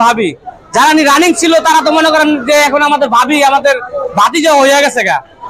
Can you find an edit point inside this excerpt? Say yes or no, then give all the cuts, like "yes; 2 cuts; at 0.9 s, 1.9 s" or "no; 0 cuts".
no; 0 cuts